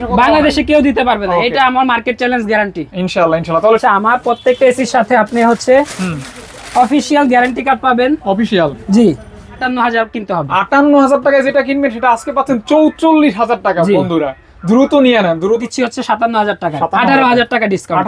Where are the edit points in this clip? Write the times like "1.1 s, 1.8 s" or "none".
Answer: 3.8 s, 9.6 s, 15.7 s